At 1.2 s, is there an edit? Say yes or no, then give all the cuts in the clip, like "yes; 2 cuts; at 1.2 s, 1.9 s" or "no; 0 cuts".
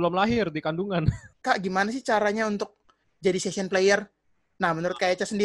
yes; 1 cut; at 1.2 s